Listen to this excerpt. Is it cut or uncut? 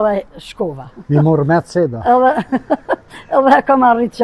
uncut